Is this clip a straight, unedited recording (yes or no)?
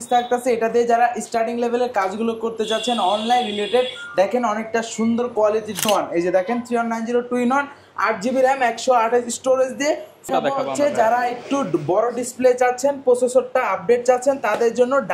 no